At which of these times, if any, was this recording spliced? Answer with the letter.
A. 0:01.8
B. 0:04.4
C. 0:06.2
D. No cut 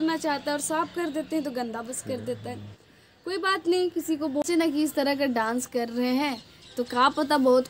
B